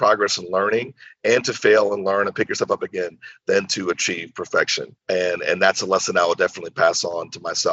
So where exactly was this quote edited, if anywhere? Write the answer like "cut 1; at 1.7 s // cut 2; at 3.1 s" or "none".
cut 1; at 4.9 s